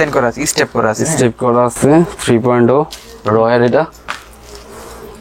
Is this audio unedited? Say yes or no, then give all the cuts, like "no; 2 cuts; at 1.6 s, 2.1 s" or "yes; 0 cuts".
yes; 0 cuts